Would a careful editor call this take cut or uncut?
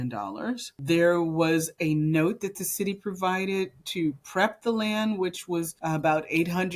uncut